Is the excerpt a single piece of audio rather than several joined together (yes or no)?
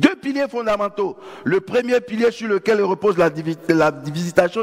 yes